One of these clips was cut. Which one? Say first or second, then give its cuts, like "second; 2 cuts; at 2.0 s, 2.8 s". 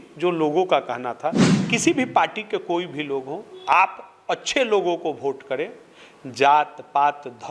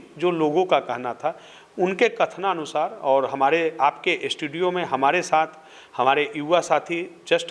first; 1 cut; at 1.6 s